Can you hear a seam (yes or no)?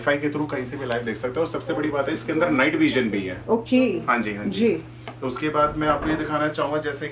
no